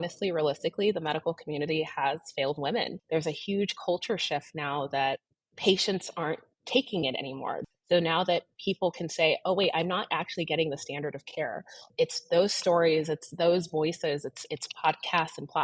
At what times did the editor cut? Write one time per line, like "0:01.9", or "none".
0:03.0
0:07.6
0:11.8